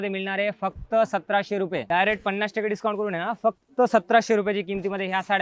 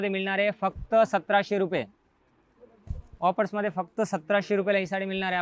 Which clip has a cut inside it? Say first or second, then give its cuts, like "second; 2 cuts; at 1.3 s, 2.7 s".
first; 1 cut; at 1.8 s